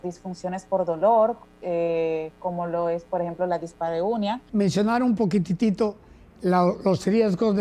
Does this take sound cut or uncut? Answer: cut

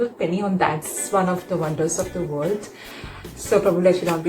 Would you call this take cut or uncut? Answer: cut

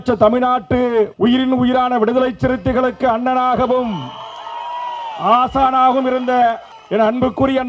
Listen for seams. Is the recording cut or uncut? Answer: cut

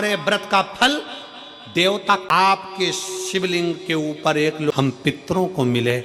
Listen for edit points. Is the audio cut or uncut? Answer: cut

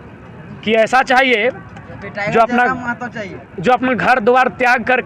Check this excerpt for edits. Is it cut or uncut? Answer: uncut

